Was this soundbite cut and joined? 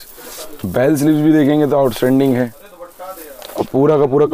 no; 0 cuts

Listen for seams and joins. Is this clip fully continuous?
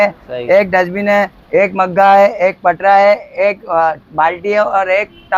yes; 0 cuts

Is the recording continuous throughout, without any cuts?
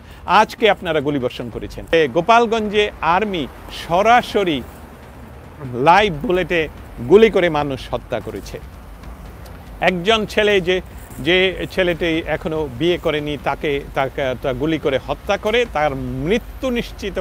no; 1 cut; at 1.9 s

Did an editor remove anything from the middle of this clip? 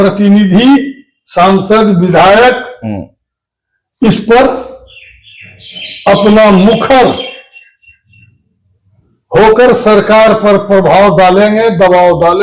no; 0 cuts

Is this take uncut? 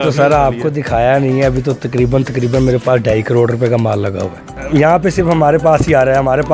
no; 1 cut; at 4.5 s

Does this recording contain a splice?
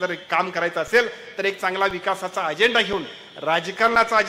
no; 0 cuts

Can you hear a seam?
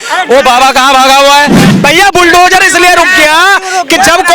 yes; 1 cut; at 1.6 s

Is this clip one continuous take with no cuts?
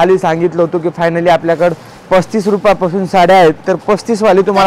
yes; 0 cuts

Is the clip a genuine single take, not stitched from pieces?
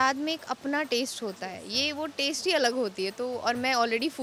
yes; 0 cuts

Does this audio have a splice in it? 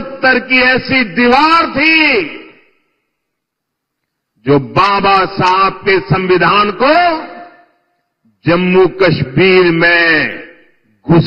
no; 0 cuts

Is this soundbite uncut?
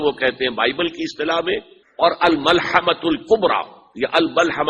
no; 1 cut; at 1.8 s

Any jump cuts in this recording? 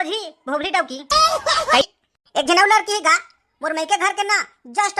yes; 1 cut; at 1.8 s

